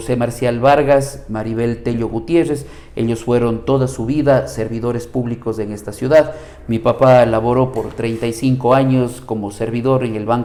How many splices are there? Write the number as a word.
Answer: zero